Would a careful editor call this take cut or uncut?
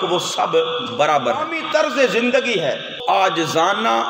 cut